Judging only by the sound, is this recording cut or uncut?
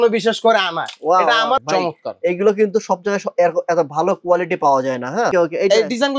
cut